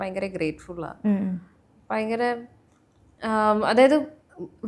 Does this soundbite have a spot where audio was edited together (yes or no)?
no